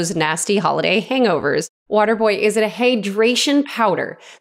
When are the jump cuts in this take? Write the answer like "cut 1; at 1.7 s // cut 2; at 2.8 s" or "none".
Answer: cut 1; at 1.8 s